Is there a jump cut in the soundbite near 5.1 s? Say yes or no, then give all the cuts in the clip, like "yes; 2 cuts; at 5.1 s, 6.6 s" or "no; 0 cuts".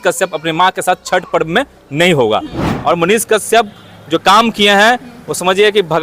no; 1 cut; at 2.6 s